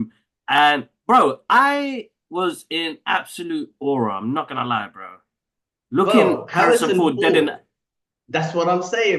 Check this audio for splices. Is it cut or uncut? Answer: uncut